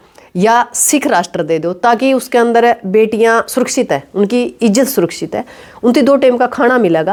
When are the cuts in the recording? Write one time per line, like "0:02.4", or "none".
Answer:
none